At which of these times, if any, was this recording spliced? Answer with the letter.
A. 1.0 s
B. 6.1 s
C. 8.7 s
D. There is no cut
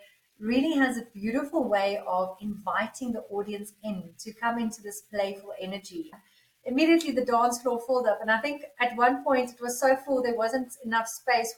B